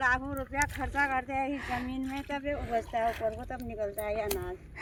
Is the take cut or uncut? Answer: uncut